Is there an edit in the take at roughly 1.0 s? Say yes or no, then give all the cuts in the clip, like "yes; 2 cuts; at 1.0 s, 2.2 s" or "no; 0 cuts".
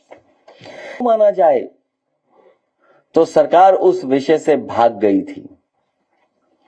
yes; 1 cut; at 1.0 s